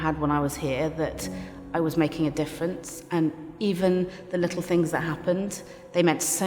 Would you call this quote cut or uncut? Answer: uncut